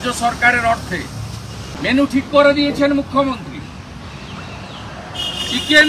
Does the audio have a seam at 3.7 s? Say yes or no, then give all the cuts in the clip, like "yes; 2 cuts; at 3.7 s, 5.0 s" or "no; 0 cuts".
no; 1 cut; at 1.7 s